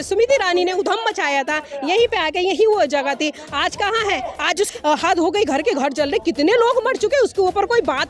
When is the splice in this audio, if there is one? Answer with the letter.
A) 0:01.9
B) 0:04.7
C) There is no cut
B